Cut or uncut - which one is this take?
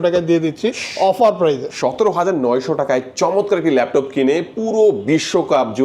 uncut